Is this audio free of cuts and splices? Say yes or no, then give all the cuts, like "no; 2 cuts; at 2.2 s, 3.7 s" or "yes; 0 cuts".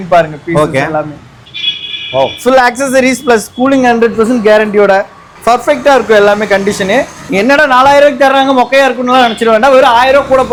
yes; 0 cuts